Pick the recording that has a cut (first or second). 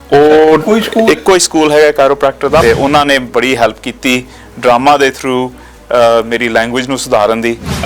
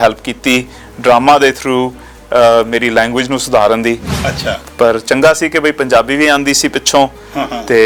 first